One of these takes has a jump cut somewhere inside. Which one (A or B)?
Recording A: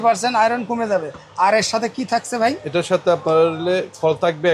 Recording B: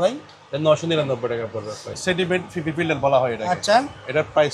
B